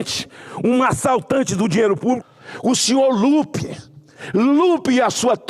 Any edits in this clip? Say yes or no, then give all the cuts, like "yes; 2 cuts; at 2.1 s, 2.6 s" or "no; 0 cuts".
yes; 1 cut; at 2.2 s